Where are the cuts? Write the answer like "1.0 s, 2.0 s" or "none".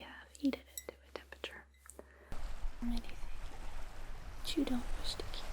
2.6 s